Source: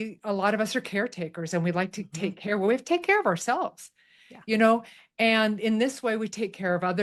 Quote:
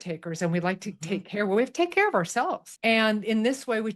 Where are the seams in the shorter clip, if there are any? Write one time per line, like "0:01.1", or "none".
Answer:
0:02.7